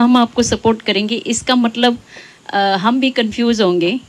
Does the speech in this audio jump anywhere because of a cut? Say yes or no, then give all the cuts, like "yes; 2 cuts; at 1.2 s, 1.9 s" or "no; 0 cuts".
no; 0 cuts